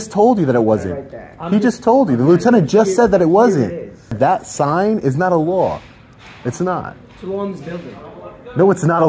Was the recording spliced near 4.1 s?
yes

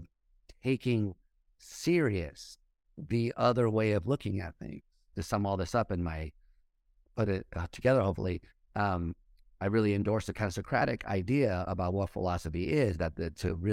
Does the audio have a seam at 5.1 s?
yes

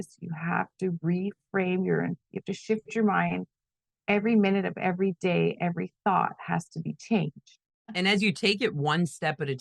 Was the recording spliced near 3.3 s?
no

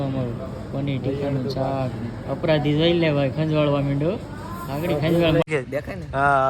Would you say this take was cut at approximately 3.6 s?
no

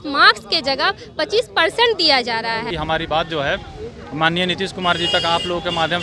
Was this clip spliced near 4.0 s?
no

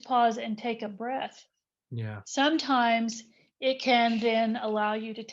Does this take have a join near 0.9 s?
yes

